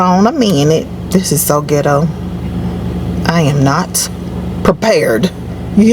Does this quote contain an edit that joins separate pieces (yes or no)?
no